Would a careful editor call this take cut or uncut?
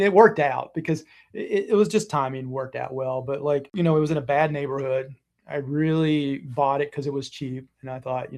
cut